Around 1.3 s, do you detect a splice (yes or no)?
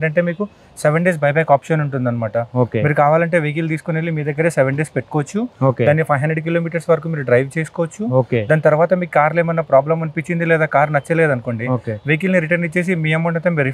no